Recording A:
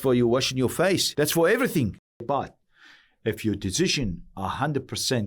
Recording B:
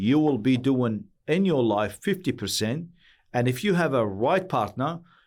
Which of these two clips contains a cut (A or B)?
A